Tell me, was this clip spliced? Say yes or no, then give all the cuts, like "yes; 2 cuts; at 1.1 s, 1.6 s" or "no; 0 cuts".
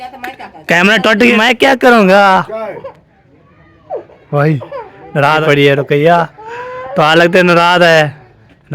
yes; 2 cuts; at 1.4 s, 5.4 s